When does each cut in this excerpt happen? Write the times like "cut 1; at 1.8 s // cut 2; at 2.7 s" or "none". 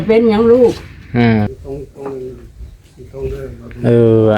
cut 1; at 1.5 s